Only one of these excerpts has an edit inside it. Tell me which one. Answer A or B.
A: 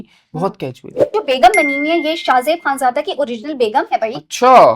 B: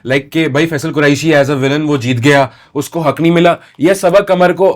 A